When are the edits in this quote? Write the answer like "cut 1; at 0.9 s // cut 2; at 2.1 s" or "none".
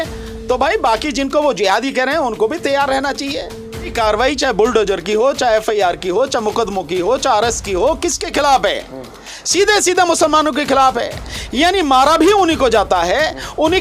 cut 1; at 3.9 s